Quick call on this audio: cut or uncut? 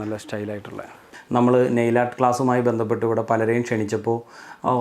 cut